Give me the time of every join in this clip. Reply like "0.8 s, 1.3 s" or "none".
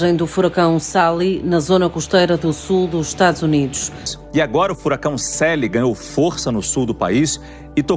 4.1 s